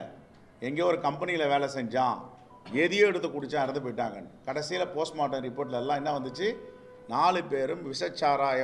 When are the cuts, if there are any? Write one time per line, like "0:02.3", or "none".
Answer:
none